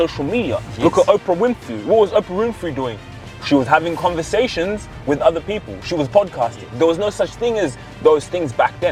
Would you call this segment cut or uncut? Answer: uncut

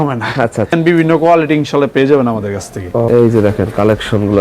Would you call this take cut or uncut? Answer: cut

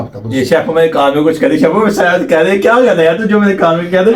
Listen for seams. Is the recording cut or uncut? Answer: uncut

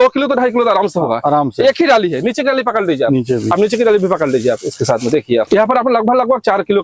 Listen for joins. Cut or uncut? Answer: uncut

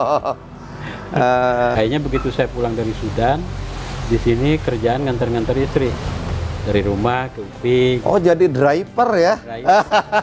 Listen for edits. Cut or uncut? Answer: cut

